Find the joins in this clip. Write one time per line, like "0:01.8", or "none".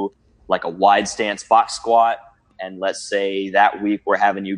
0:02.5